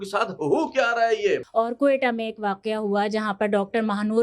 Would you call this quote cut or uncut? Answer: cut